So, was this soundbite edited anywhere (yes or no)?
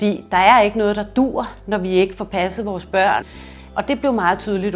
yes